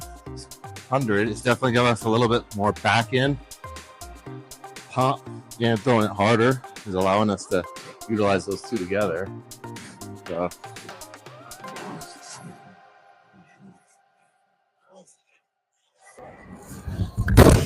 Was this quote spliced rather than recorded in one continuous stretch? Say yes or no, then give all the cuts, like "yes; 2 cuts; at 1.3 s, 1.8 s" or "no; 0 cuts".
no; 0 cuts